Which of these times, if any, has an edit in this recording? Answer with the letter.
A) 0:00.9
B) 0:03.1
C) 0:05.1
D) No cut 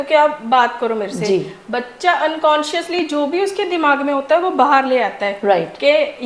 D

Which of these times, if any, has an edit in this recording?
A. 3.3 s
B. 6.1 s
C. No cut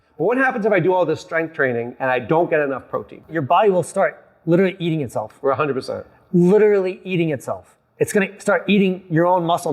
A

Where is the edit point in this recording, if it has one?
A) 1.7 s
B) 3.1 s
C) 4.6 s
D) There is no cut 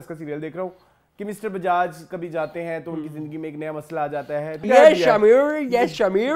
C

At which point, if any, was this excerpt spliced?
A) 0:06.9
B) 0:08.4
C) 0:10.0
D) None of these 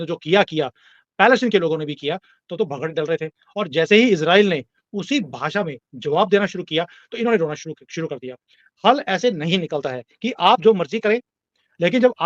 D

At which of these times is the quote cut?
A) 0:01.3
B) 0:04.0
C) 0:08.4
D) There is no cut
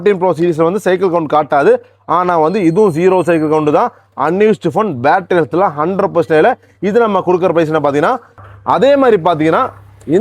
C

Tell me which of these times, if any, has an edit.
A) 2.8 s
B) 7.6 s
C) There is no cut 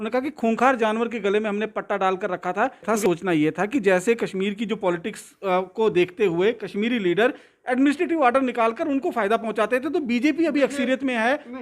A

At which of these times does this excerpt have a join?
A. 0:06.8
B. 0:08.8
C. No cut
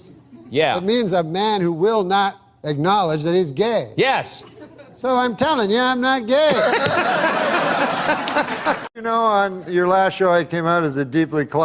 B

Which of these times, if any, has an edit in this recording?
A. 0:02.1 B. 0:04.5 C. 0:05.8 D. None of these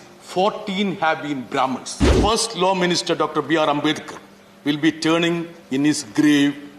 A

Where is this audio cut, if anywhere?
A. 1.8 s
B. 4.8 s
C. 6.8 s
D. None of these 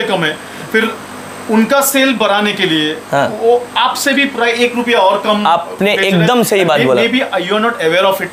D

